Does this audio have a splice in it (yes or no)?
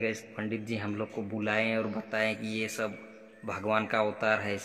no